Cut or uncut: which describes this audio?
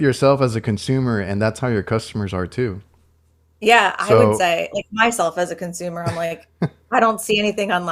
uncut